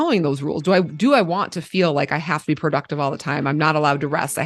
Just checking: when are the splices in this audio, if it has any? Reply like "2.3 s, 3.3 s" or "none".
none